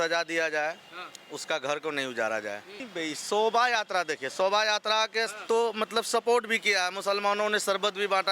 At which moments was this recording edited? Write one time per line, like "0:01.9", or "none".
0:02.8